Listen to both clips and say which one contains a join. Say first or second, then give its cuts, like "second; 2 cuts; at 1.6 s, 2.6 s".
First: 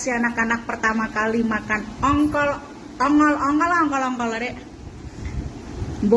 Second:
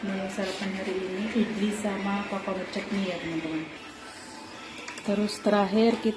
second; 1 cut; at 3.7 s